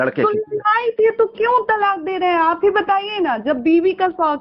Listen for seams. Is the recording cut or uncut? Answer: uncut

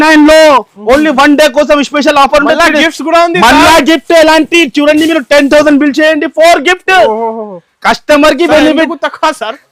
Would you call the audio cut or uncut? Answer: uncut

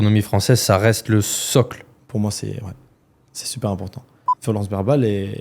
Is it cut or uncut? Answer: cut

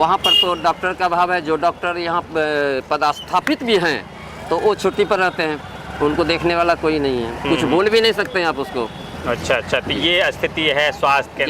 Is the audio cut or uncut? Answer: uncut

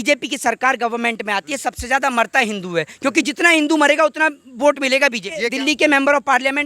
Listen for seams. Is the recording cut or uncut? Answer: cut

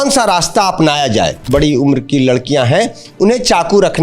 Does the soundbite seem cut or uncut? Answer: cut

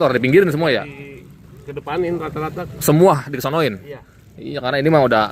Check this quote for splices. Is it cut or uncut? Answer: uncut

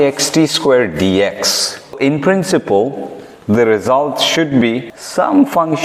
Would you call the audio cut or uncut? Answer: cut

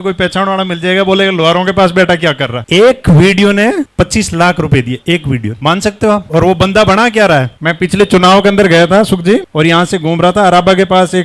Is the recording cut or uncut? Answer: uncut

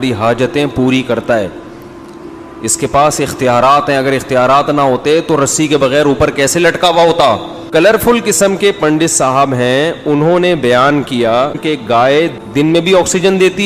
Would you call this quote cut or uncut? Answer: cut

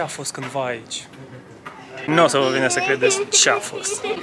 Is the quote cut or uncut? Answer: uncut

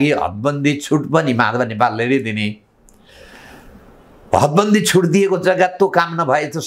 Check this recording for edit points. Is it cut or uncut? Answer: uncut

